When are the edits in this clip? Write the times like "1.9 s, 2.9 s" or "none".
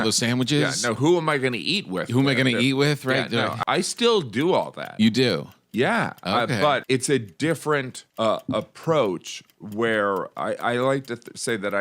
3.6 s, 6.8 s, 8.0 s